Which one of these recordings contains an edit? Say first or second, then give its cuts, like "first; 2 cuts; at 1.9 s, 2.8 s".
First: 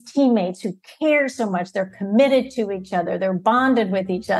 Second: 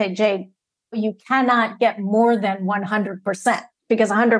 second; 1 cut; at 1.0 s